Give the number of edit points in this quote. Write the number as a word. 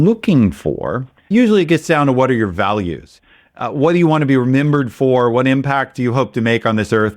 one